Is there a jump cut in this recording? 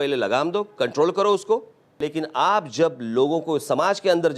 yes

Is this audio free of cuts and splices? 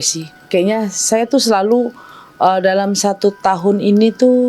yes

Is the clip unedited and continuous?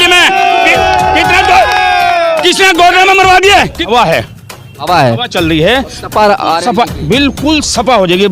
no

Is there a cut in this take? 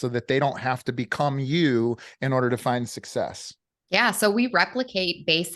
no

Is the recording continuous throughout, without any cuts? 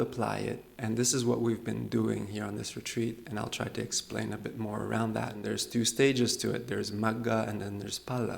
no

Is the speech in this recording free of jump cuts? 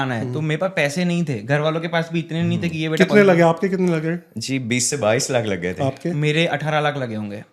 yes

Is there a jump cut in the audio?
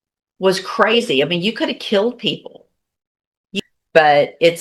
yes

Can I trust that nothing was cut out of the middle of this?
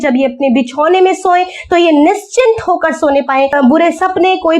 no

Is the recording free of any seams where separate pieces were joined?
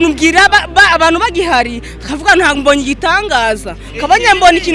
yes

